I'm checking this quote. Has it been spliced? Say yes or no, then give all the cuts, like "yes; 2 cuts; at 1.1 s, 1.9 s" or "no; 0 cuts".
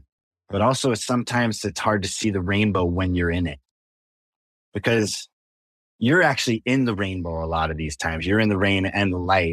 no; 0 cuts